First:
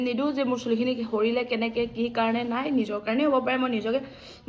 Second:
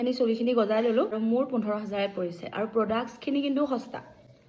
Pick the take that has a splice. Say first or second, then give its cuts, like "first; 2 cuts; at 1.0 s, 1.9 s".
second; 1 cut; at 1.1 s